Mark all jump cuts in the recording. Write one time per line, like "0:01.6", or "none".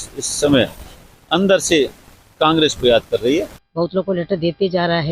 0:03.6